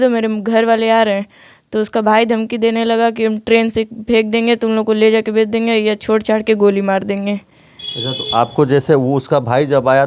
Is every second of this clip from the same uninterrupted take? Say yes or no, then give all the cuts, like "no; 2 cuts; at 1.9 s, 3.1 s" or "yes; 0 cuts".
yes; 0 cuts